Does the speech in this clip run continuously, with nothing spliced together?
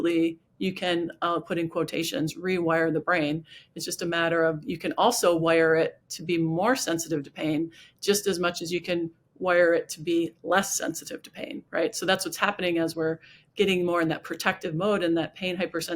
yes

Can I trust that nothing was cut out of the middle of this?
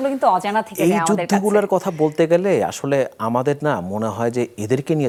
yes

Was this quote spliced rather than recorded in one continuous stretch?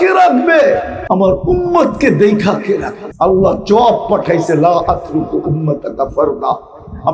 yes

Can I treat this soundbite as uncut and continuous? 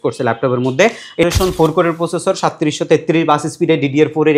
no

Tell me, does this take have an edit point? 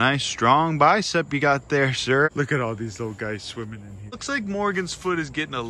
no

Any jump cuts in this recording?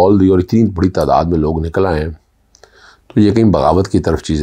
no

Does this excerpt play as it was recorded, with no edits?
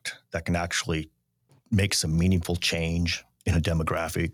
yes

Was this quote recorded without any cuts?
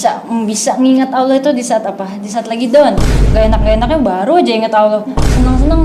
no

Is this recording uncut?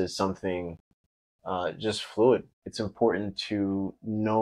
no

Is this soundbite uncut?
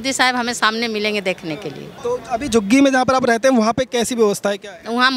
no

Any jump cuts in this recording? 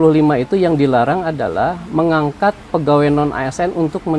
no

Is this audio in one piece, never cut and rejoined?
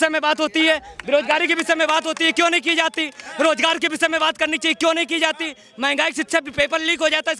yes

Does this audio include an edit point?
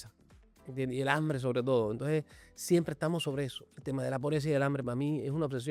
no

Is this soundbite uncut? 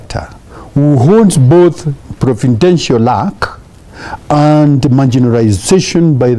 yes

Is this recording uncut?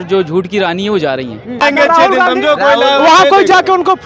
no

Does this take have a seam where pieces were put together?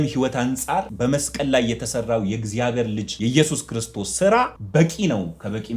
yes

